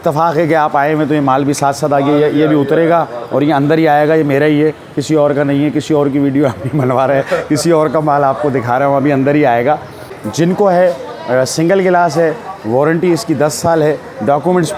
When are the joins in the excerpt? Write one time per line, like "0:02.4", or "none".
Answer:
0:10.1